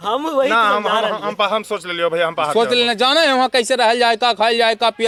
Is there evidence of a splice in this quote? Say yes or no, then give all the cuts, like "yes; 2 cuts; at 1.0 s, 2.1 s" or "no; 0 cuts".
no; 0 cuts